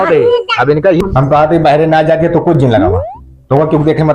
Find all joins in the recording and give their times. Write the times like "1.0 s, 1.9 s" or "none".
1.0 s